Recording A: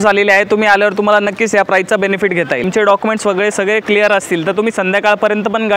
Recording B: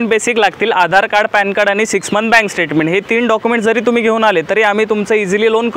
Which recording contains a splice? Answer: A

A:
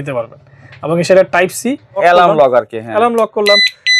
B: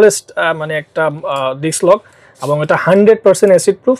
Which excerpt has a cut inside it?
A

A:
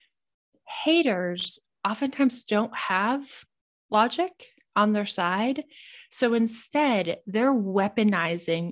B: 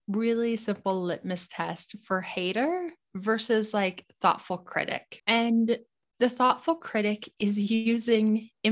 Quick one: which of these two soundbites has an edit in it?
B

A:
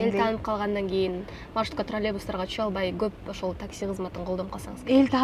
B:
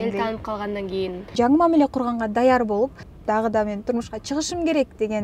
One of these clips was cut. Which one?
B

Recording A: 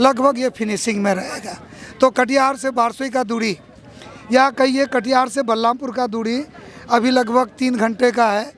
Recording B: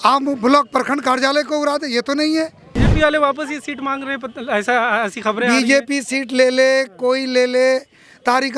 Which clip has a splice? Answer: B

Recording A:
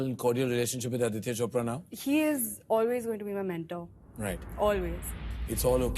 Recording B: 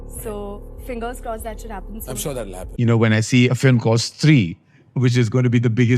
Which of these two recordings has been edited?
B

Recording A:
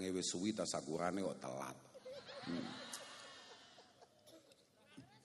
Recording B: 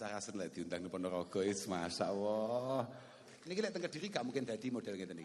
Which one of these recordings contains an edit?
B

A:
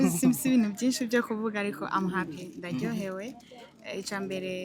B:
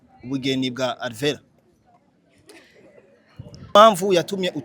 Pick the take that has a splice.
B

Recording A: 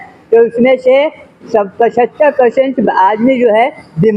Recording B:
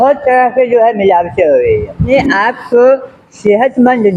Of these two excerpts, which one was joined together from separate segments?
B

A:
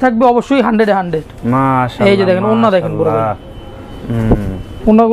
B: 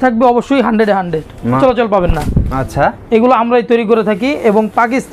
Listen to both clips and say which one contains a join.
B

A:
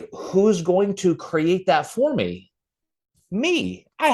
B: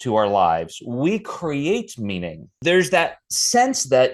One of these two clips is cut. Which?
B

